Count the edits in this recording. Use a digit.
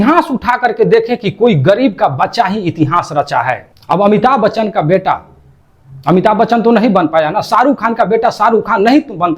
1